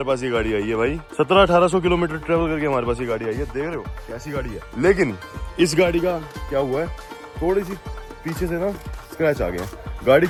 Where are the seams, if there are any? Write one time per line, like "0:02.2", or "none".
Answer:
none